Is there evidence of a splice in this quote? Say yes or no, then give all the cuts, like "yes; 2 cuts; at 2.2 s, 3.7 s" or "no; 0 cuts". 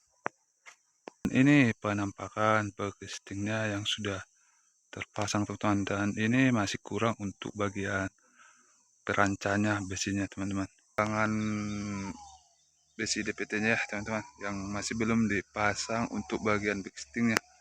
yes; 2 cuts; at 1.2 s, 11.0 s